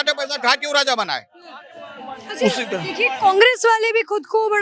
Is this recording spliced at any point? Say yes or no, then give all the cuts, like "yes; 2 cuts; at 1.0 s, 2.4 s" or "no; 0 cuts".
no; 0 cuts